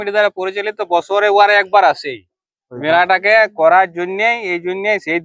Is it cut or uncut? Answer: uncut